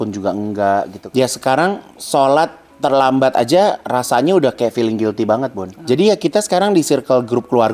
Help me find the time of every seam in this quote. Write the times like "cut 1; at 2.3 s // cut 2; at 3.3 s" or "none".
cut 1; at 1.0 s // cut 2; at 1.9 s // cut 3; at 5.7 s